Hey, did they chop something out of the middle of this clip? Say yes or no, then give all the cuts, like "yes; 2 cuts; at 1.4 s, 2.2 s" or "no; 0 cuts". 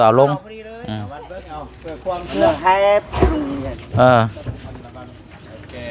no; 0 cuts